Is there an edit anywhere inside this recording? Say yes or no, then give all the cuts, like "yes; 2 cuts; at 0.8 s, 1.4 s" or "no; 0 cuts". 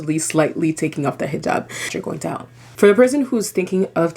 yes; 1 cut; at 2.1 s